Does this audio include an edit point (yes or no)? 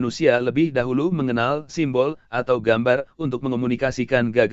yes